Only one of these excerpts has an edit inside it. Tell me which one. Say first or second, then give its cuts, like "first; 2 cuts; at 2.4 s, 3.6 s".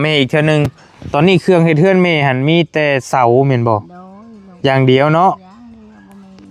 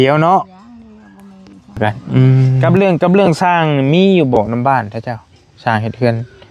second; 1 cut; at 2.6 s